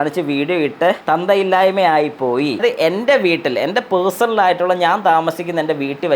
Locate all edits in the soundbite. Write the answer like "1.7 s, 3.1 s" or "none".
2.6 s